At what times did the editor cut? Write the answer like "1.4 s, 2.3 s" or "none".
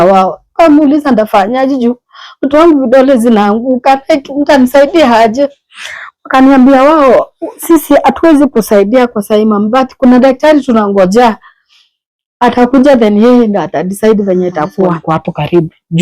15.0 s